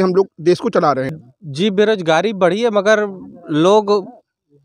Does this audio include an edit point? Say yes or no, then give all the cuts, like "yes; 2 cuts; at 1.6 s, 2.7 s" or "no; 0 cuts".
yes; 1 cut; at 1.2 s